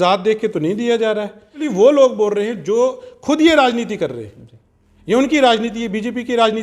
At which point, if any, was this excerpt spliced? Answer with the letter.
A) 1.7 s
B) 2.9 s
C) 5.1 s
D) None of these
A